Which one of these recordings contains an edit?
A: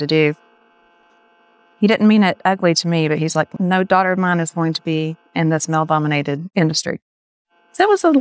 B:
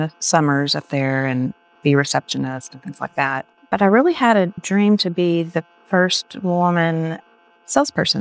B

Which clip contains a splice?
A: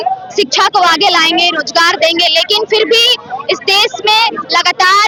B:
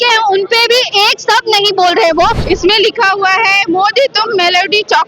B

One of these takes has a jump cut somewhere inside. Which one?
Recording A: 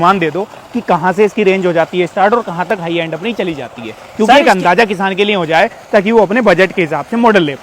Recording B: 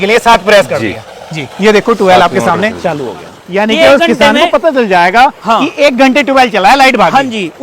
B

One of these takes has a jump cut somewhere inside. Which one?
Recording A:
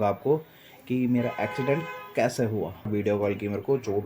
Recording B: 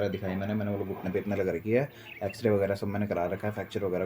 A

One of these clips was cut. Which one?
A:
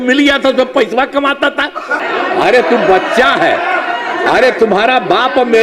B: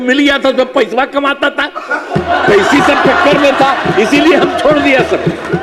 A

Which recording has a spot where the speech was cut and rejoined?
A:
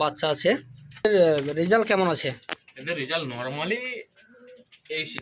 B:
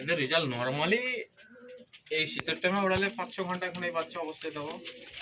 A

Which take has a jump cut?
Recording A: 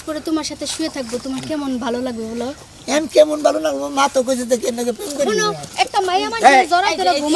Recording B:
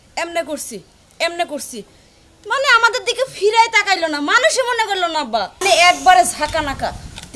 B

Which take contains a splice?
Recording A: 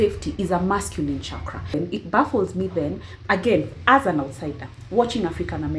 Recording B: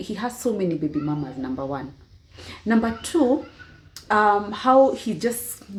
A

